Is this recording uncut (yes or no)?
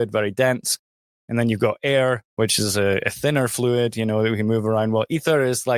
yes